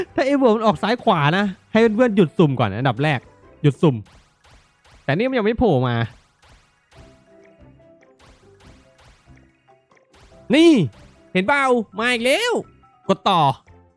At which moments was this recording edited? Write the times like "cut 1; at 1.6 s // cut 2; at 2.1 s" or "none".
none